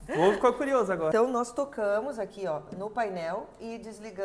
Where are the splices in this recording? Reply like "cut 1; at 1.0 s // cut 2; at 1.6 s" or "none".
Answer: cut 1; at 1.1 s